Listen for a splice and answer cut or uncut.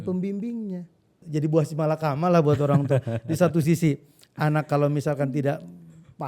cut